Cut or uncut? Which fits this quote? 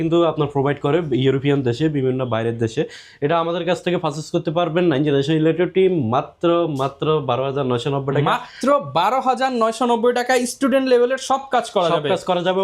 uncut